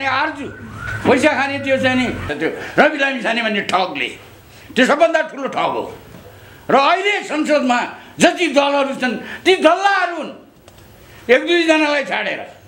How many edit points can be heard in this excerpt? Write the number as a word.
one